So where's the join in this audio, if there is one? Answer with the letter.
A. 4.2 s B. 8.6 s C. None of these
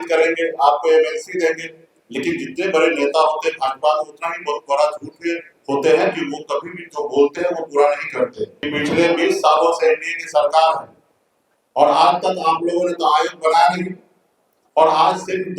B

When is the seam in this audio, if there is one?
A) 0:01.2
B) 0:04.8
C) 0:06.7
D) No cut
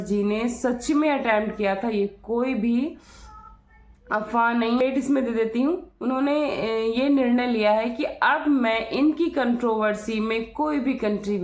B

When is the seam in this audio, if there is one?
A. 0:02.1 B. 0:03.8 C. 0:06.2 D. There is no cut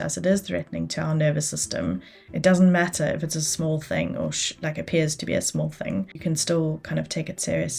C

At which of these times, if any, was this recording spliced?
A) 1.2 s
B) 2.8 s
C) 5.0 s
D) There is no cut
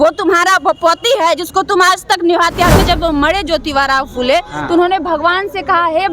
B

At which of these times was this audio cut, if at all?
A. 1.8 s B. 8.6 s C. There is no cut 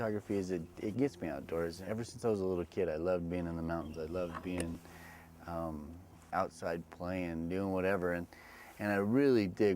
A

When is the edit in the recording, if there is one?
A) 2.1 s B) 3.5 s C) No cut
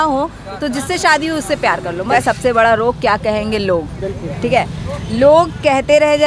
A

